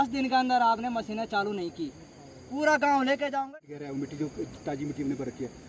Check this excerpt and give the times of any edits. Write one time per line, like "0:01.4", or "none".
0:03.4